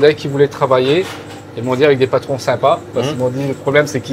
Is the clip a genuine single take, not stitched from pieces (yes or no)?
yes